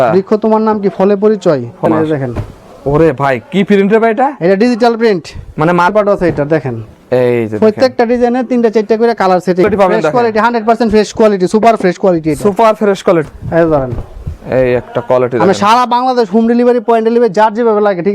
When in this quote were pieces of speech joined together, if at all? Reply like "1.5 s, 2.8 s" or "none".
1.9 s, 5.9 s, 9.6 s, 13.2 s